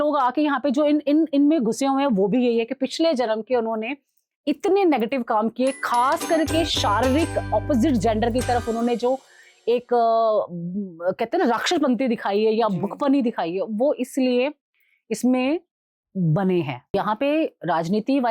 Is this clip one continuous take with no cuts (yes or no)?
no